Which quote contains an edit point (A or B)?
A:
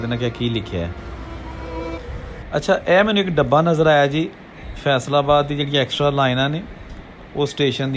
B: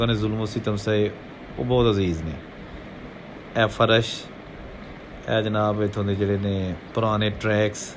A